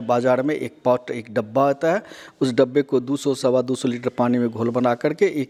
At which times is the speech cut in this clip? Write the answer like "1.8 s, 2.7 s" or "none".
none